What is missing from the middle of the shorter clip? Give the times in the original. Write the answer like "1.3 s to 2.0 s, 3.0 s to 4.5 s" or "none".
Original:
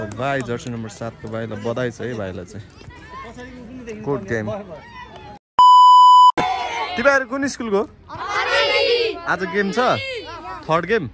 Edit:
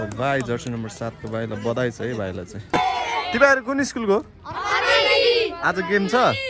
2.7 s to 6.3 s